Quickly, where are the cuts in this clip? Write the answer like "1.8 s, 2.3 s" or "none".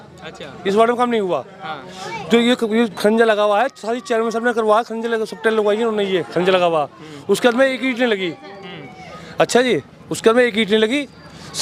none